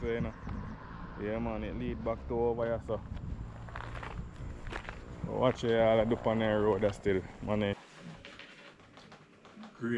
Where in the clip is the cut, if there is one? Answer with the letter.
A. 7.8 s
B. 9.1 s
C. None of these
A